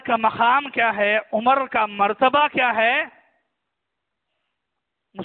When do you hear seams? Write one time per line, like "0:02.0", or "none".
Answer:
none